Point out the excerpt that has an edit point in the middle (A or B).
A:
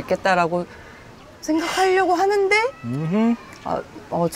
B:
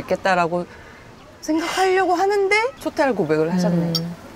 B